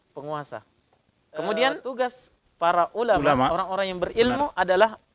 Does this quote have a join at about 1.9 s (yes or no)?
yes